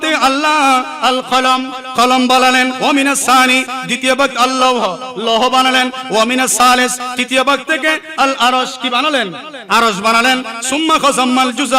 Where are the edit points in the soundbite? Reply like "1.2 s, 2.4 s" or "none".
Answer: 2.8 s